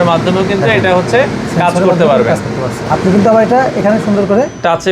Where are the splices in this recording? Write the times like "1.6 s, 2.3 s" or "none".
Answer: 1.4 s, 2.9 s

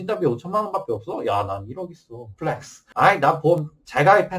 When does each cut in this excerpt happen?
2.4 s

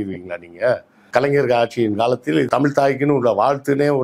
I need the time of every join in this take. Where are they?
0.9 s, 2.5 s

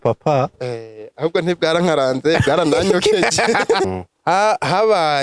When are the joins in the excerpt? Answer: 3.9 s

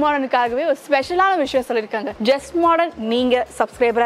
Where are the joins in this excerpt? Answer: 2.0 s

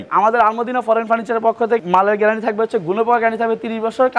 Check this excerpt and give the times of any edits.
1.9 s

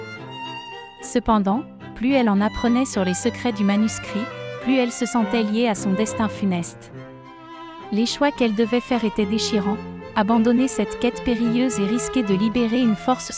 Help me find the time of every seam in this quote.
1.1 s

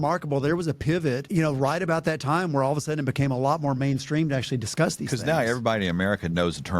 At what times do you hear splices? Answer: 1.2 s

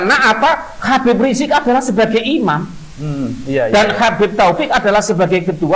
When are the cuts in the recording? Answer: none

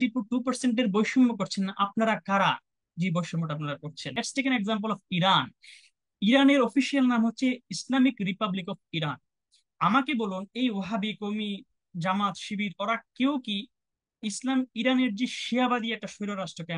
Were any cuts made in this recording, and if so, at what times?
4.1 s

